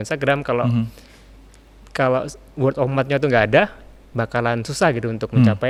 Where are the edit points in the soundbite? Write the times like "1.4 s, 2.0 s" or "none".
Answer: none